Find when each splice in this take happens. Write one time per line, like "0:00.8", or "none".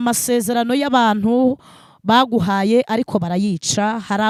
none